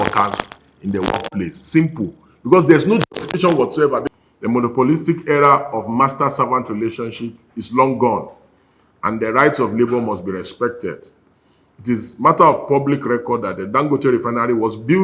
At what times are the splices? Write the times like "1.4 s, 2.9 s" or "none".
4.1 s